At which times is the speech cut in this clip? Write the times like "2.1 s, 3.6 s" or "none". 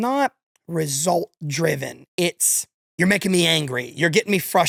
none